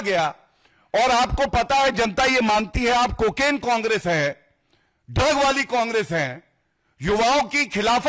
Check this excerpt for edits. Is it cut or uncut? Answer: uncut